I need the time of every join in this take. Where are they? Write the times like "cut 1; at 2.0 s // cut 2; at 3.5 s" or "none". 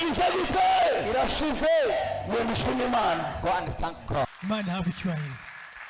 cut 1; at 4.3 s